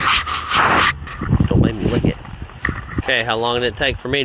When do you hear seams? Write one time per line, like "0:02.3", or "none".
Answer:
0:02.9